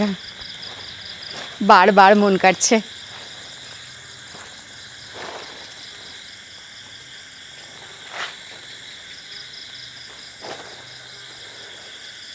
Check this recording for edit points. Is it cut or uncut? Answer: uncut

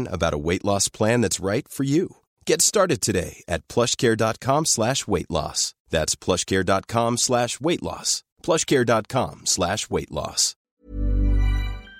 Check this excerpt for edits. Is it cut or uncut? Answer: cut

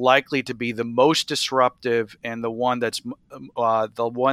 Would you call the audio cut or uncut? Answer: uncut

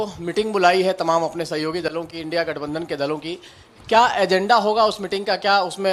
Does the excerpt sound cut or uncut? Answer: uncut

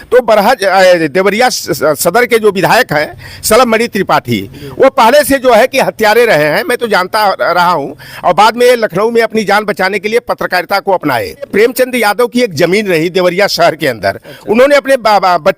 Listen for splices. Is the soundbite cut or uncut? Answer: cut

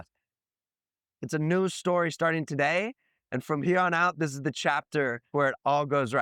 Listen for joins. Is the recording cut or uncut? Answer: cut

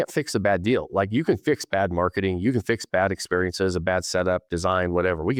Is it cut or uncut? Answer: uncut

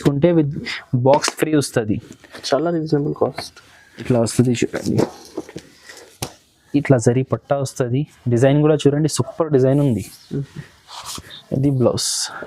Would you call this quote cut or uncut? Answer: cut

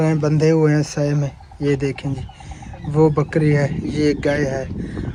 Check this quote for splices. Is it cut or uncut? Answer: uncut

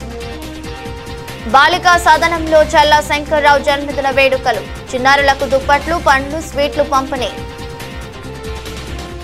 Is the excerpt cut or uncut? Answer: cut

